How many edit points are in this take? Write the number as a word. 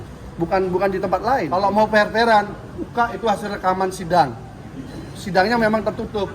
one